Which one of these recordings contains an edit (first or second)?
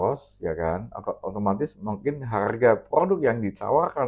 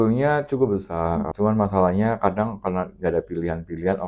second